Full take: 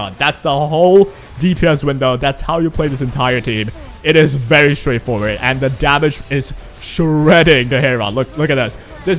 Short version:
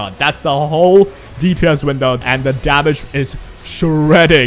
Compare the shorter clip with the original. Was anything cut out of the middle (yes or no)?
yes